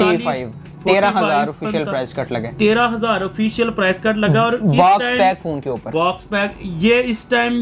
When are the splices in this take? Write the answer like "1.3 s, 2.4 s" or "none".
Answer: none

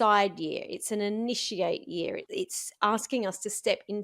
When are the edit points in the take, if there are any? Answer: 2.2 s

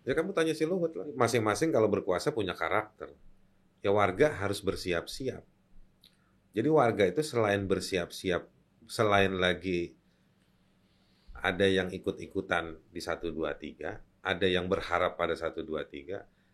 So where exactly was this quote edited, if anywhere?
1.1 s

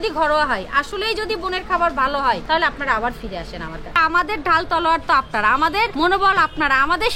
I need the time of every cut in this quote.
2.4 s, 4.0 s, 5.9 s

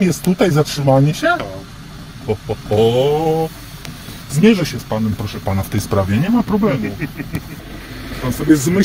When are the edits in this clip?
7.6 s

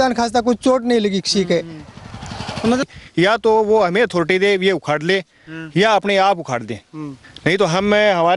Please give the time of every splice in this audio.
2.8 s

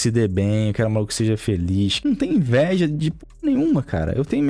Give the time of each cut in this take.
1.9 s

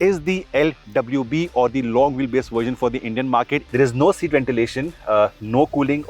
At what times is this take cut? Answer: 3.7 s

